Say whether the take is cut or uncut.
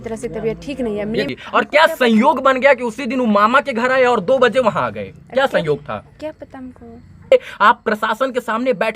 cut